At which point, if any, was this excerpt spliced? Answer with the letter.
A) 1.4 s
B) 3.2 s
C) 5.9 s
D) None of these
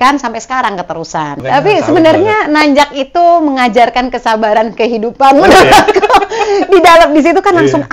A